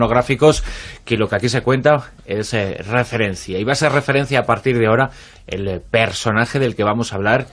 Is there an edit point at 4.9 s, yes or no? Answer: yes